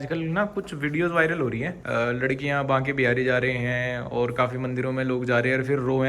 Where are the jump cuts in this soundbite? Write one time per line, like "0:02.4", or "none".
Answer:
0:01.8